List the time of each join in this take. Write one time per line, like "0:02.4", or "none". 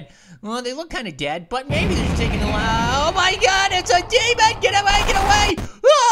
none